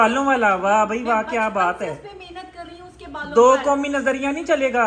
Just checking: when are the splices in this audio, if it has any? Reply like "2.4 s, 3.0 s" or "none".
none